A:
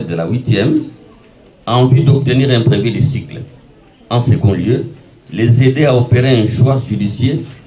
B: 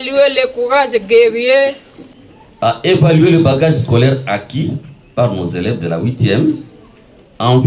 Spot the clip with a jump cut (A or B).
B